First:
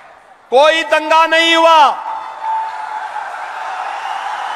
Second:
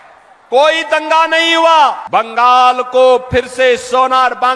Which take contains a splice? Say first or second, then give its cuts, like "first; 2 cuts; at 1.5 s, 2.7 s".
second; 1 cut; at 2.0 s